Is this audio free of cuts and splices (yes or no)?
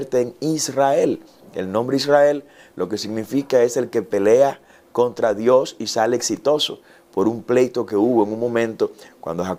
yes